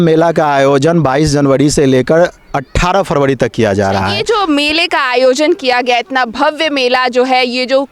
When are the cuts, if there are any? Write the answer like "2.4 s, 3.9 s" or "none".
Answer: 4.2 s